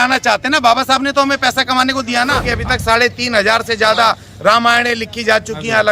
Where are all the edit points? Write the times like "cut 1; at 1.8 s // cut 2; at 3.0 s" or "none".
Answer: cut 1; at 2.5 s

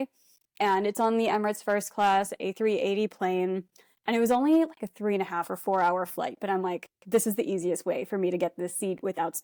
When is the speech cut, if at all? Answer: none

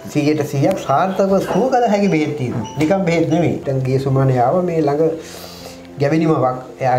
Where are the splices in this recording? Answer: cut 1; at 3.6 s

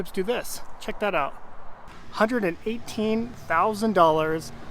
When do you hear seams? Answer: cut 1; at 2.0 s

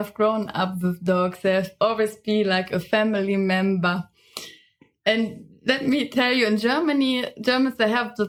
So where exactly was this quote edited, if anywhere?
none

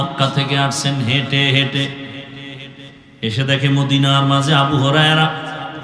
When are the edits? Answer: none

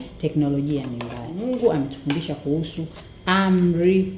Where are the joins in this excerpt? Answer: cut 1; at 1.4 s

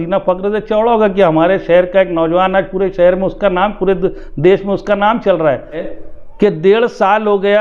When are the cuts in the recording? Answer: cut 1; at 5.8 s

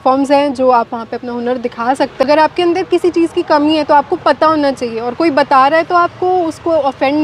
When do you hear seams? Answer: cut 1; at 2.2 s

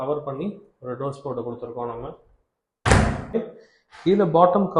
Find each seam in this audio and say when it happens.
cut 1; at 3.3 s

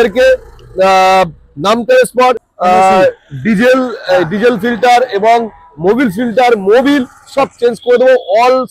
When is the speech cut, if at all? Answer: cut 1; at 2.5 s

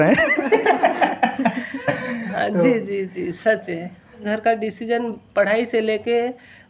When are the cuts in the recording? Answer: cut 1; at 4.2 s

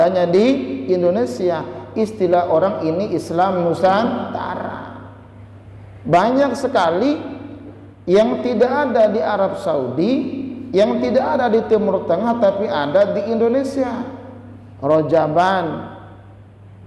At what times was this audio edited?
none

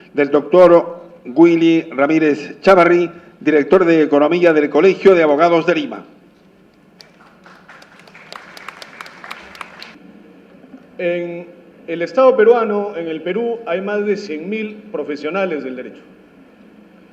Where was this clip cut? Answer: cut 1; at 12.0 s

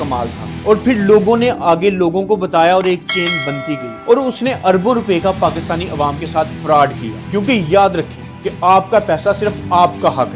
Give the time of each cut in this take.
cut 1; at 7.2 s

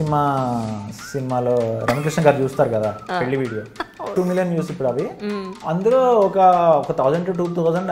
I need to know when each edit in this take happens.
cut 1; at 4.1 s

